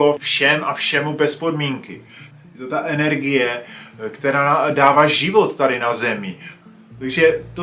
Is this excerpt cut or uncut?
uncut